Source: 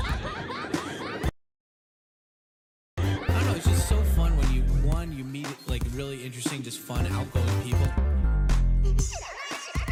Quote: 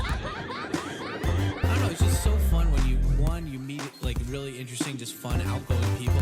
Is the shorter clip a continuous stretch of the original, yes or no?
no